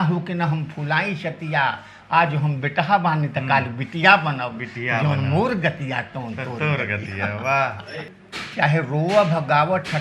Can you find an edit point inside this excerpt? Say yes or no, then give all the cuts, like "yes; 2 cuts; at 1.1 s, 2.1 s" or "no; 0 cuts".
yes; 1 cut; at 8.1 s